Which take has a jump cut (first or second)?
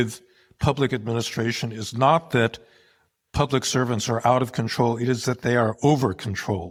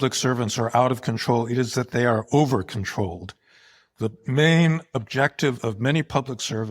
second